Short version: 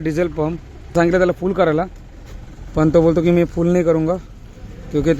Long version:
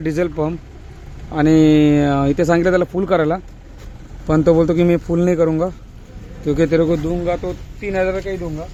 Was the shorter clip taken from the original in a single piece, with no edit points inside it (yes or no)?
no